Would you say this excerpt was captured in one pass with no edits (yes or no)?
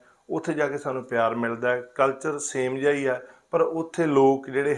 yes